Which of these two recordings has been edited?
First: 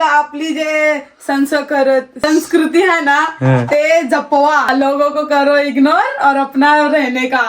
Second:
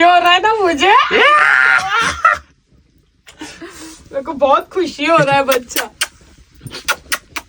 first; 2 cuts; at 2.1 s, 4.7 s

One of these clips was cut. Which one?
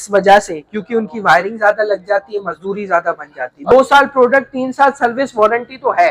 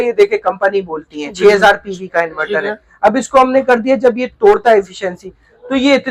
first; 1 cut; at 3.7 s

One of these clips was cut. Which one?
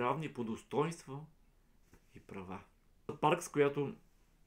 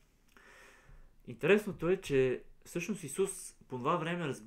first; 1 cut; at 3.1 s

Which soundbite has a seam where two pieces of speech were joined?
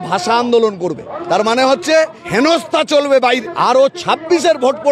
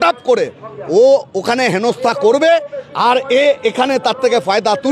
first; 3 cuts; at 1.1 s, 2.2 s, 3.4 s

